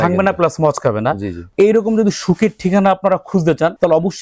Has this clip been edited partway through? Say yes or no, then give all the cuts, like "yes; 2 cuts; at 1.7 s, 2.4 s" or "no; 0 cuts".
no; 0 cuts